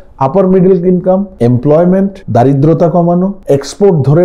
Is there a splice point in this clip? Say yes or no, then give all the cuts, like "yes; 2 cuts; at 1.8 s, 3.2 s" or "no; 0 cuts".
yes; 3 cuts; at 1.3 s, 2.2 s, 3.4 s